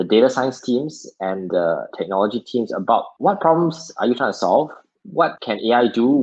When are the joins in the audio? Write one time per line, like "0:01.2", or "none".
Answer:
none